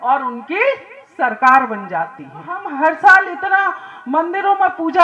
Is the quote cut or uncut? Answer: cut